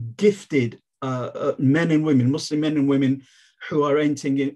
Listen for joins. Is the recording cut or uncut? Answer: uncut